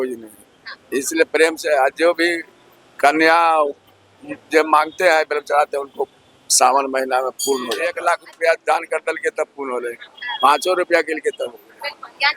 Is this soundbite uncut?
no; 1 cut; at 8.0 s

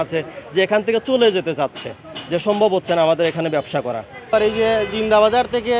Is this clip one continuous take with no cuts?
no; 1 cut; at 4.3 s

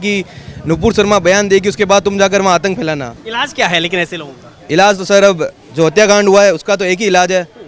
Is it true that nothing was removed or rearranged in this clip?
no; 1 cut; at 3.2 s

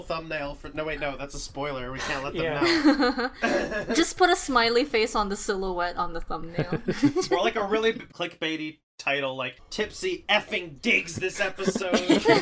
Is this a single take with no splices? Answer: yes; 0 cuts

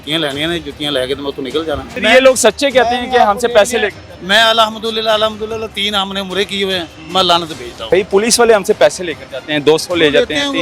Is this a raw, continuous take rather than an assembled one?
no; 2 cuts; at 1.9 s, 7.9 s

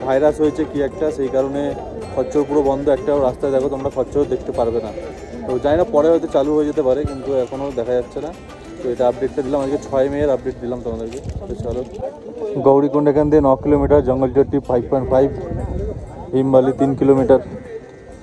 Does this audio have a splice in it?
no; 0 cuts

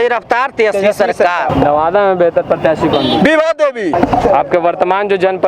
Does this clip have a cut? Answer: yes; 2 cuts; at 1.5 s, 3.9 s

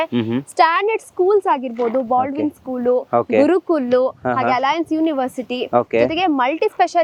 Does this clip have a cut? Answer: no; 0 cuts

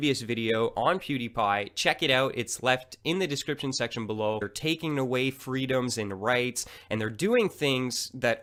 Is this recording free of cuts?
yes; 0 cuts

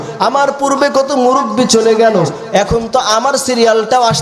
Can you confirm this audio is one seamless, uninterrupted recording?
yes; 0 cuts

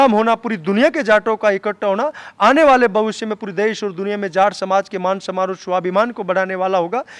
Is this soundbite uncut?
yes; 0 cuts

